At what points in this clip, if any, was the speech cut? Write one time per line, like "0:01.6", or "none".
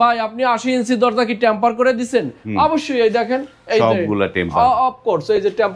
none